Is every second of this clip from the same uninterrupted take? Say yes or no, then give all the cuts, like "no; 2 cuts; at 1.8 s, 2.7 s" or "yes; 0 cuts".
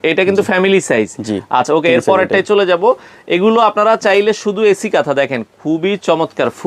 yes; 0 cuts